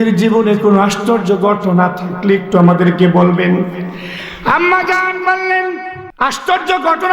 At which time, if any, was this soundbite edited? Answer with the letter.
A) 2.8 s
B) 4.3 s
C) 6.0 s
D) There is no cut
C